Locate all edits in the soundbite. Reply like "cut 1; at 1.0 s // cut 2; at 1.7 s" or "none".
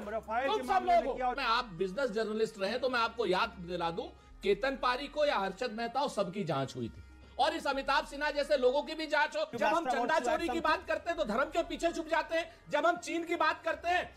cut 1; at 1.4 s // cut 2; at 7.2 s // cut 3; at 9.5 s